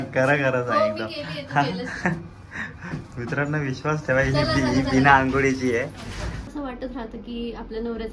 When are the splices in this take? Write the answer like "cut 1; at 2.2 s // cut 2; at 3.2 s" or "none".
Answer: cut 1; at 6.5 s